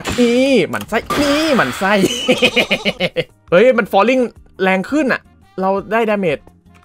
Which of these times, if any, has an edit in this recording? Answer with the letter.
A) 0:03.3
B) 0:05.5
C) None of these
A